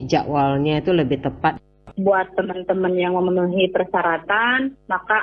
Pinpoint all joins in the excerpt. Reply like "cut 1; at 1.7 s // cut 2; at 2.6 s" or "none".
cut 1; at 1.7 s

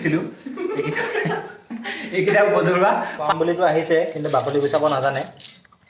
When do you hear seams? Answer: cut 1; at 3.2 s

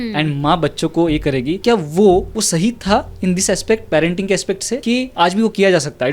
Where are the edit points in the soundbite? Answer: cut 1; at 1.6 s // cut 2; at 2.4 s // cut 3; at 5.0 s

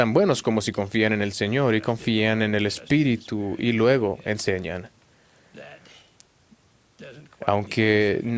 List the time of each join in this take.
cut 1; at 2.2 s

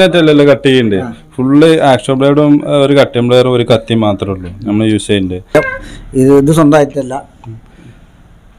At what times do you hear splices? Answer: cut 1; at 5.5 s

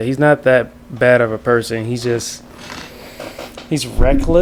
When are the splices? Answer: none

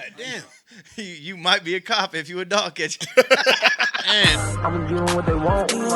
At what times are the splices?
cut 1; at 4.3 s

